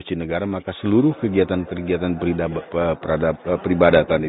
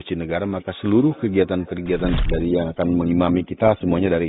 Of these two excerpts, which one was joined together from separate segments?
second; 1 cut; at 2.2 s

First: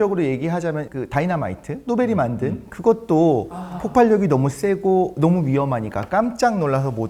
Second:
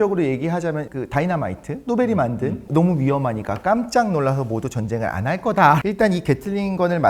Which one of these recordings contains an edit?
second; 2 cuts; at 2.7 s, 5.8 s

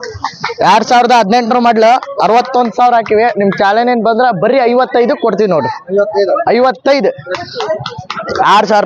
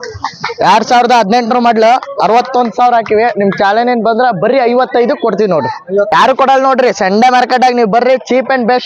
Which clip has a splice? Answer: second; 1 cut; at 6.1 s

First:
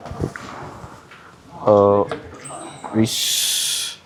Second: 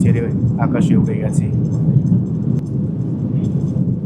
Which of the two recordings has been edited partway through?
second; 1 cut; at 2.6 s

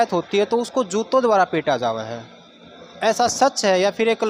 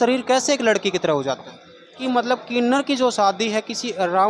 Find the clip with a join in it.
second; 1 cut; at 2.0 s

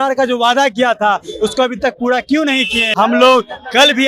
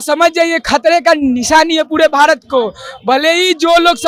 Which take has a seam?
first; 1 cut; at 2.8 s

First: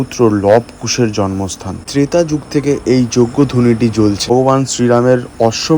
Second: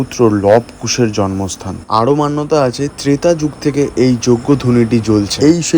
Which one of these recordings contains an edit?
first; 2 cuts; at 1.8 s, 4.3 s

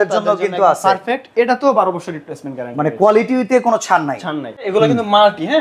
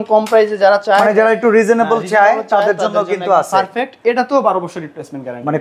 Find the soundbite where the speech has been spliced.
first; 1 cut; at 4.7 s

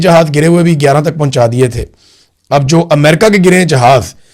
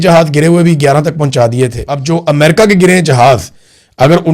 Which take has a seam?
second; 1 cut; at 1.9 s

